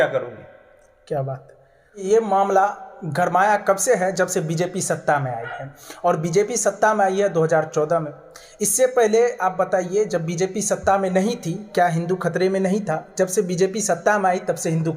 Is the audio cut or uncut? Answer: cut